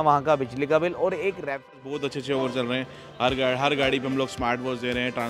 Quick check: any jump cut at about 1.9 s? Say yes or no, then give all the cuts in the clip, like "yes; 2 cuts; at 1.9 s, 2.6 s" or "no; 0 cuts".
yes; 1 cut; at 1.9 s